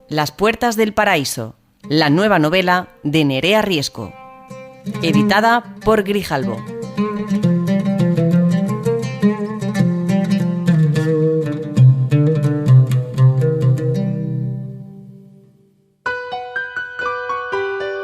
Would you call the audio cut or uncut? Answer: cut